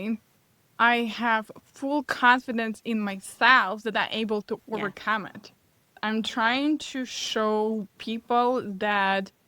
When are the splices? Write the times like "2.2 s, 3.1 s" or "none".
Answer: 5.9 s